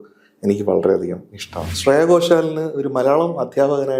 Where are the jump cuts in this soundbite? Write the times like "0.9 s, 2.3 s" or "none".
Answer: 1.7 s